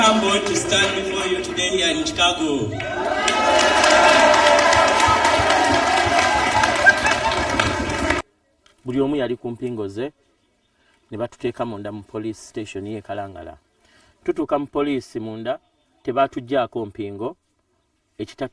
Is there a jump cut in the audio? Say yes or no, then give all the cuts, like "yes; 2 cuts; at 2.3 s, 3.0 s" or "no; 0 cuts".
yes; 1 cut; at 8.2 s